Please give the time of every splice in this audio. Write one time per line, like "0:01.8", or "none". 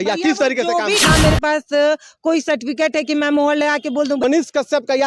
0:01.0
0:04.2